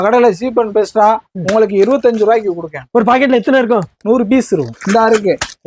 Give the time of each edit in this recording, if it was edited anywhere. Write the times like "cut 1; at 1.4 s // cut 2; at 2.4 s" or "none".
cut 1; at 4.7 s